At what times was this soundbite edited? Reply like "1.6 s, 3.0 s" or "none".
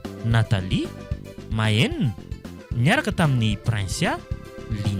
none